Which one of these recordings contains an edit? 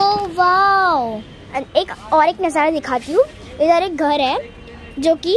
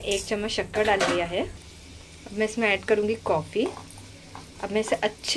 first; 1 cut; at 1.5 s

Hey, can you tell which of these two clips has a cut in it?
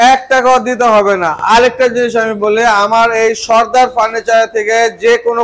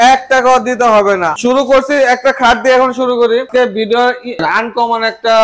second; 2 cuts; at 1.3 s, 3.5 s

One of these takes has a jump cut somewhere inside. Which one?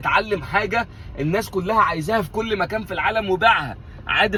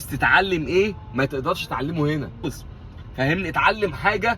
second; 1 cut; at 2.4 s

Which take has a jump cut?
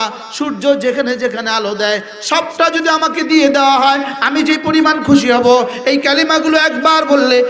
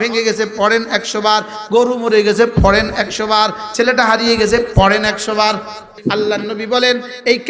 second; 1 cut; at 5.9 s

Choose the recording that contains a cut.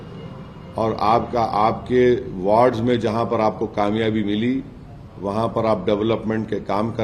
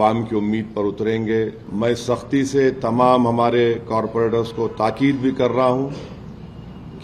second; 1 cut; at 1.7 s

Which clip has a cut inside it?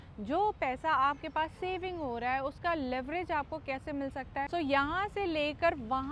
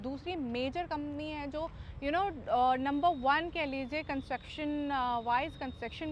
first; 1 cut; at 4.5 s

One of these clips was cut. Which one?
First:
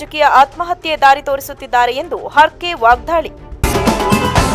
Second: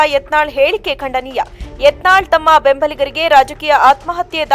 first; 1 cut; at 3.4 s

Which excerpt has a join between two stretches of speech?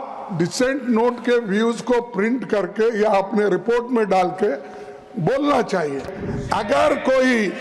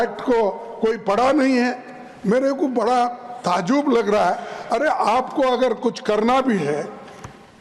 first; 1 cut; at 6.2 s

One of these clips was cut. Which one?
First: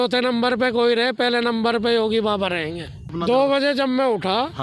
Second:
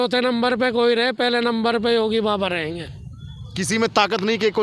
first; 1 cut; at 3.1 s

